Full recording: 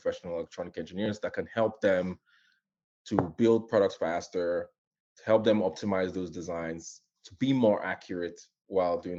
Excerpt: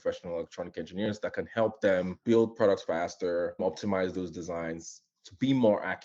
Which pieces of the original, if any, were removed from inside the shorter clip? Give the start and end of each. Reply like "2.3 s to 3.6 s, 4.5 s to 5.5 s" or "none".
2.2 s to 3.3 s, 4.7 s to 5.6 s